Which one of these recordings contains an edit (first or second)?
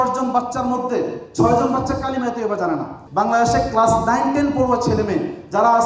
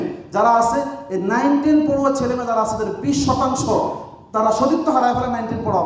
first